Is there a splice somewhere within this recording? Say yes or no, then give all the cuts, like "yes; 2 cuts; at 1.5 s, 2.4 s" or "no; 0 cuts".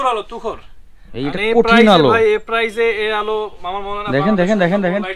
no; 0 cuts